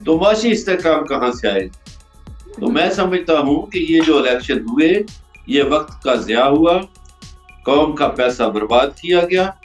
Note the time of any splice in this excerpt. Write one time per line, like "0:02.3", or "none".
none